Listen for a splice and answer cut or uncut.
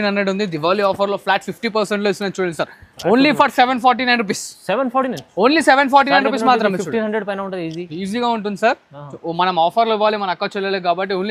uncut